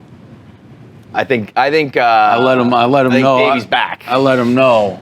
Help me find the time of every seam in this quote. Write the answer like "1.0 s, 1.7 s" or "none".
none